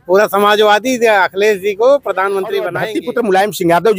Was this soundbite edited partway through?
yes; 1 cut; at 2.8 s

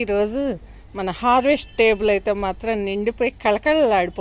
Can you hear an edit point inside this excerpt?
no; 0 cuts

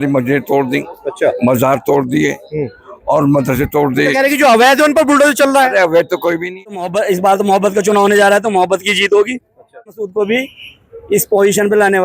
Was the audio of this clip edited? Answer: yes; 2 cuts; at 6.8 s, 9.9 s

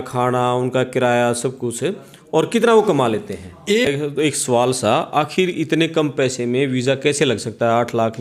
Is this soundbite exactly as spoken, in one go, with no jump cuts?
no; 1 cut; at 3.9 s

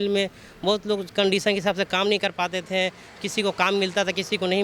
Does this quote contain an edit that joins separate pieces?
no; 0 cuts

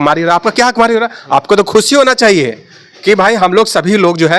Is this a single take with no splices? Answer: yes; 0 cuts

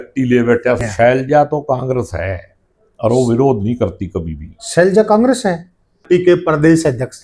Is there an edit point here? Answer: yes; 2 cuts; at 0.8 s, 6.0 s

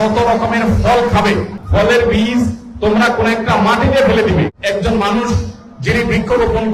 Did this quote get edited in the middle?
yes; 2 cuts; at 1.6 s, 4.5 s

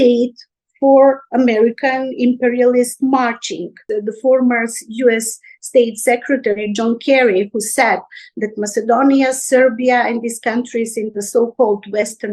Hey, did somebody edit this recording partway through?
yes; 1 cut; at 3.8 s

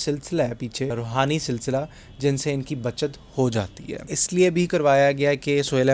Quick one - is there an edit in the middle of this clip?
yes; 2 cuts; at 0.9 s, 4.2 s

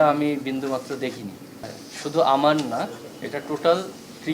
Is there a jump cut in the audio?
yes; 1 cut; at 1.8 s

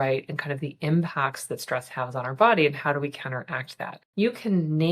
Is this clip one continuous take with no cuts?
no; 1 cut; at 4.0 s

